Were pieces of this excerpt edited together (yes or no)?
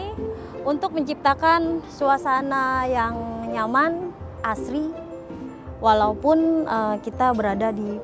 no